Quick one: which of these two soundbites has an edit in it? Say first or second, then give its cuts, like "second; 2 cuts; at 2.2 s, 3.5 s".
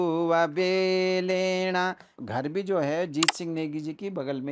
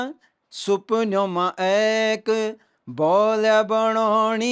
first; 1 cut; at 2.1 s